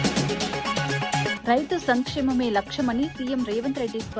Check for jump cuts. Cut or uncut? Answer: cut